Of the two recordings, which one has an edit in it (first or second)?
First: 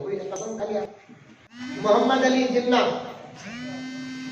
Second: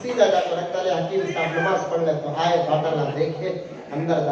first